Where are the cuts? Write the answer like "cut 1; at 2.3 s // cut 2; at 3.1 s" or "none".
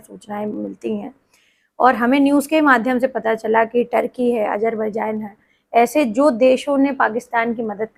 none

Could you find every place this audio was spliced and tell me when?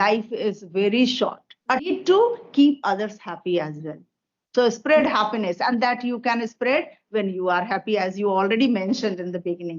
cut 1; at 1.9 s

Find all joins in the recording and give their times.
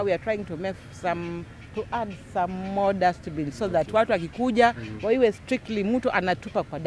none

